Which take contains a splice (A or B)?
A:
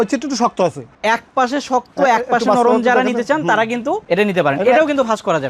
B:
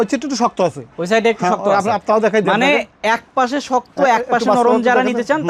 A